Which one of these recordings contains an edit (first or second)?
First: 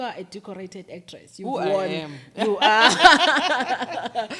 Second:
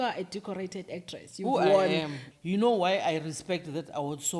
second